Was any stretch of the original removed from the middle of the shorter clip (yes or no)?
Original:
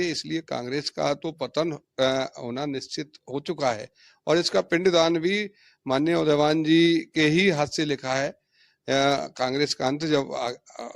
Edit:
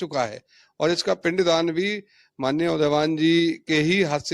no